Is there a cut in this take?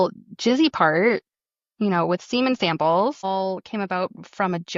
no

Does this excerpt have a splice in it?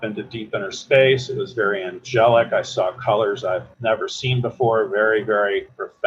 no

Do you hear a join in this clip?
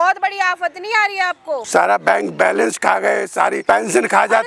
yes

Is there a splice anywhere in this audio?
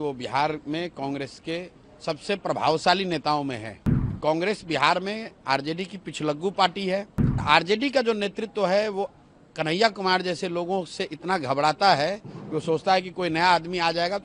yes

